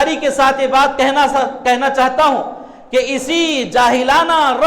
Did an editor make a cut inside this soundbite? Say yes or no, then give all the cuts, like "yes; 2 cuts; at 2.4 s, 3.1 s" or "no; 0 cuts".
no; 0 cuts